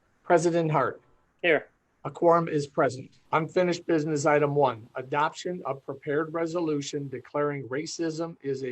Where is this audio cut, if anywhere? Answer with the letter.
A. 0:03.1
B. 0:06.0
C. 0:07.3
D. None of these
A